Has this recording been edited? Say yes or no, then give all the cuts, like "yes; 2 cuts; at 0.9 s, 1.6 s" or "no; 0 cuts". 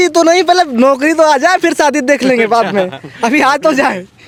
no; 0 cuts